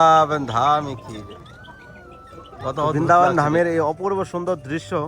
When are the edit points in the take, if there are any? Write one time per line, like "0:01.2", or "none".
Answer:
0:02.9